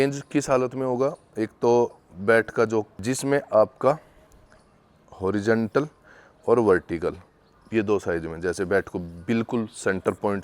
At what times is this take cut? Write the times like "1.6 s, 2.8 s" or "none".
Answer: 3.0 s